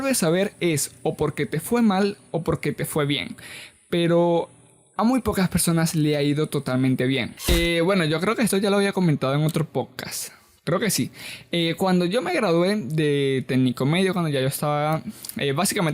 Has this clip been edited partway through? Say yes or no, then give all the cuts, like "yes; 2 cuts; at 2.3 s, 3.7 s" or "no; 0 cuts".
yes; 1 cut; at 7.3 s